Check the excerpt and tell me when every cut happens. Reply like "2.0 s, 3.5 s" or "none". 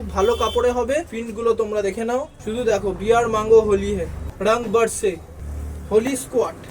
1.0 s, 4.2 s

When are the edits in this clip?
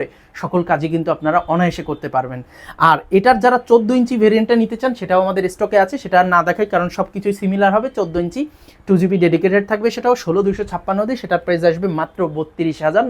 none

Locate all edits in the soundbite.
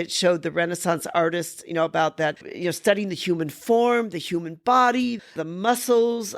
2.5 s

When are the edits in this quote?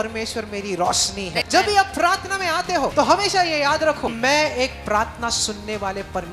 1.4 s, 2.9 s, 4.1 s

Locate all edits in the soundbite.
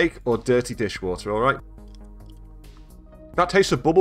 1.6 s, 2.9 s

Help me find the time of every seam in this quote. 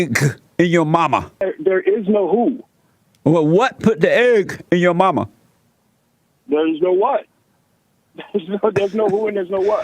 1.4 s

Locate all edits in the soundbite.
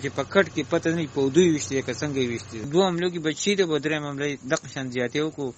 2.7 s

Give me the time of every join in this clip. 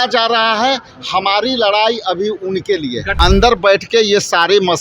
3.1 s

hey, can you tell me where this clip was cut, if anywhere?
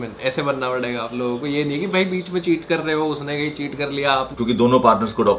4.3 s

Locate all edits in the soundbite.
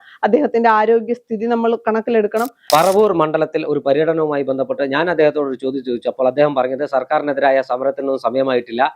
2.5 s

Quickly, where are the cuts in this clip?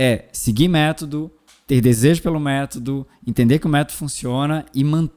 none

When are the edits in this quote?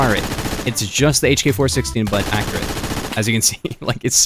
none

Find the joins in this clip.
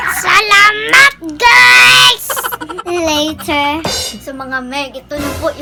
none

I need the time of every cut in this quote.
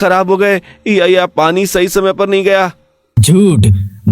none

